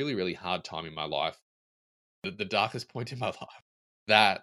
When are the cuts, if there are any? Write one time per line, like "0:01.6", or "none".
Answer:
0:01.9